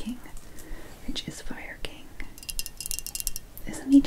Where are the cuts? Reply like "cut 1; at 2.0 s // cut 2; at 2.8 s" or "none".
cut 1; at 2.5 s

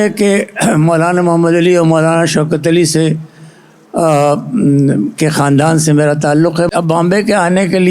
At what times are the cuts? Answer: cut 1; at 6.7 s

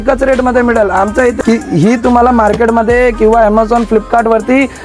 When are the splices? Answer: cut 1; at 1.4 s

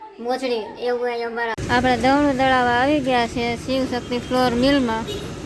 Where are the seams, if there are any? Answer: cut 1; at 1.6 s

